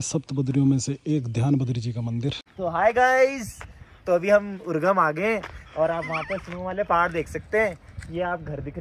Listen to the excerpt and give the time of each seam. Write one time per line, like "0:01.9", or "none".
0:02.4